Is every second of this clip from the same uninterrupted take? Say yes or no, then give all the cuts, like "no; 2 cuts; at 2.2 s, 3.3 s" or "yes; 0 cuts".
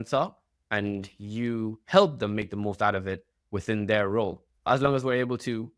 no; 1 cut; at 4.7 s